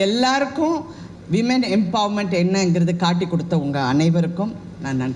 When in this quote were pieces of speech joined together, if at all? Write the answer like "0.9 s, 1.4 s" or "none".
none